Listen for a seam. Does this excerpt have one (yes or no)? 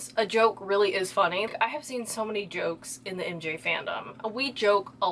yes